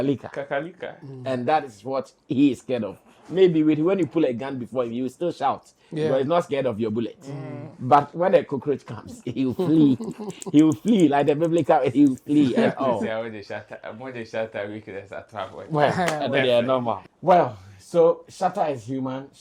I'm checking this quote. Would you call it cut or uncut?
cut